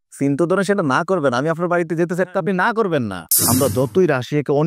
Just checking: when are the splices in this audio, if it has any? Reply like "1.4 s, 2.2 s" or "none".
3.3 s